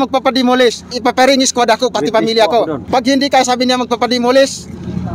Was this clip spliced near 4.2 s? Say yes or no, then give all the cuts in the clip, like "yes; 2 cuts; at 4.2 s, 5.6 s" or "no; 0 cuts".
no; 2 cuts; at 0.9 s, 2.8 s